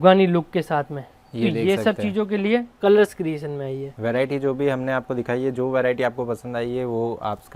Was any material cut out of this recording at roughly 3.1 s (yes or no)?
no